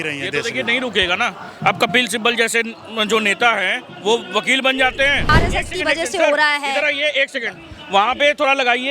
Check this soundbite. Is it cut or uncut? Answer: cut